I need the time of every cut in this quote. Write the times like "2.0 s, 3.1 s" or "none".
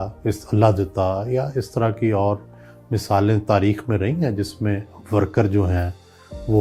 none